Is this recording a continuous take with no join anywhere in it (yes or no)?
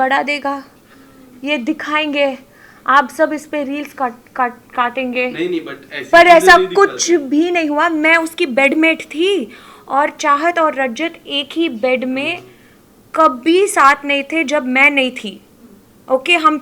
yes